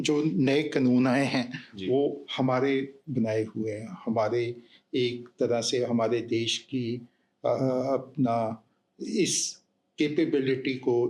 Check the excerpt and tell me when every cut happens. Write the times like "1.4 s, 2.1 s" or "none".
none